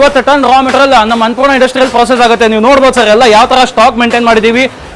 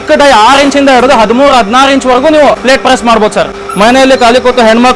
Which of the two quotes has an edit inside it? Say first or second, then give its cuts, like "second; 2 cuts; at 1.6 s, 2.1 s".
second; 2 cuts; at 2.6 s, 3.6 s